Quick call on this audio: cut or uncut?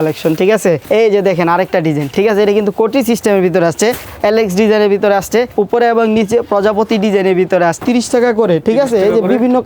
cut